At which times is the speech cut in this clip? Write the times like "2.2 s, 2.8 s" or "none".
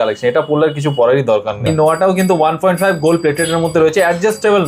1.7 s